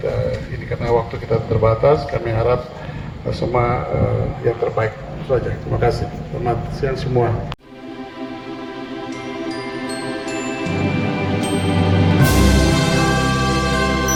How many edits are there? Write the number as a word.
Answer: zero